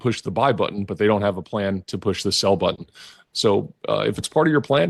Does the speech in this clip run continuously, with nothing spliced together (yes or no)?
yes